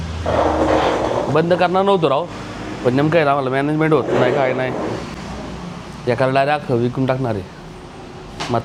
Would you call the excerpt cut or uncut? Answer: uncut